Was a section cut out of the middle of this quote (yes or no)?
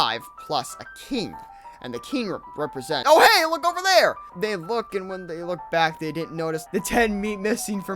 yes